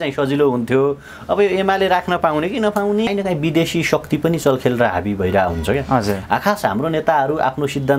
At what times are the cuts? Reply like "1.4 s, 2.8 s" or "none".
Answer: 3.1 s